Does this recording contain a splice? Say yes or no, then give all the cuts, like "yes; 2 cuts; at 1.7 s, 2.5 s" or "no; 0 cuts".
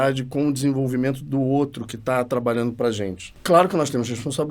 yes; 1 cut; at 3.3 s